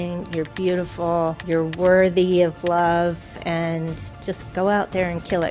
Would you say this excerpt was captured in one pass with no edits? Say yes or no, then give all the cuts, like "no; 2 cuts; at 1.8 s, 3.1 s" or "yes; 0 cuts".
no; 1 cut; at 1.4 s